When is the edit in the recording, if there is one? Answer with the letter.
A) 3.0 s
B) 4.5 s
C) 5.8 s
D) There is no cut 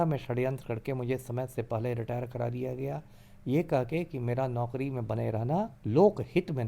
C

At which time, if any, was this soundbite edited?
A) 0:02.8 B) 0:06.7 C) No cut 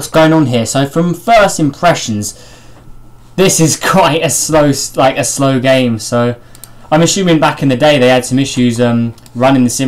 B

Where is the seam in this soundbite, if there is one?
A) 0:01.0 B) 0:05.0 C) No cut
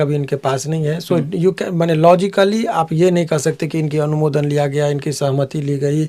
C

